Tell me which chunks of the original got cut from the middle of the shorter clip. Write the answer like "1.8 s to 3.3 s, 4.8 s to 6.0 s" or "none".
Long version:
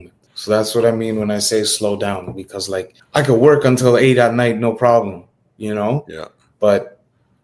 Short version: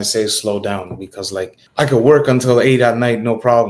none